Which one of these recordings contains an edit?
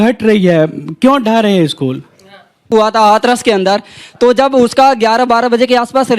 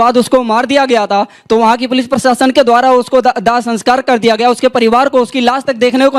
first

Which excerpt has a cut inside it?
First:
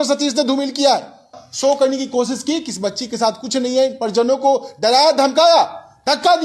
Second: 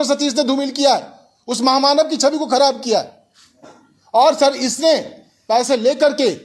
first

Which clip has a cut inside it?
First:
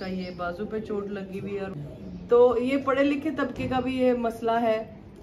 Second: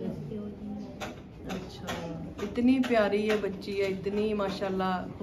first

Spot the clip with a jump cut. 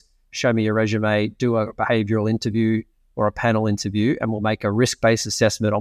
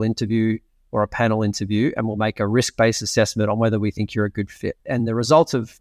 second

